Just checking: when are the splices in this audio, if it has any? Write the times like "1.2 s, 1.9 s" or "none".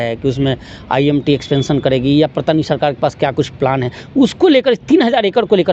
none